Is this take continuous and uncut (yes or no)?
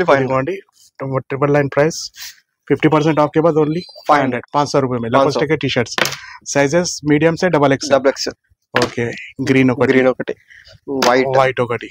yes